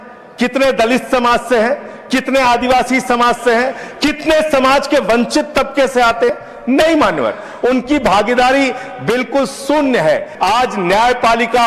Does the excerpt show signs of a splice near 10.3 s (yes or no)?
yes